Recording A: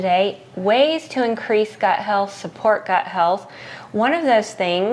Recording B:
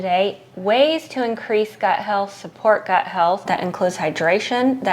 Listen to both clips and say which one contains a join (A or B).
B